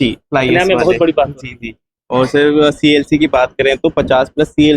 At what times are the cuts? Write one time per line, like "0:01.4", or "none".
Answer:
none